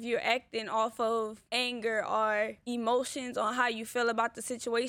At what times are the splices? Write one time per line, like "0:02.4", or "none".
0:01.4
0:02.6